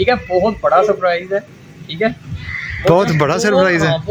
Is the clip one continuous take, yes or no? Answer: yes